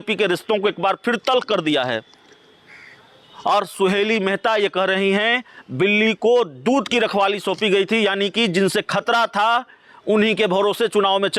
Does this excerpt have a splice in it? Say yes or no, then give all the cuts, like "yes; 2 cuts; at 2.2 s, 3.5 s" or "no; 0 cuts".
no; 0 cuts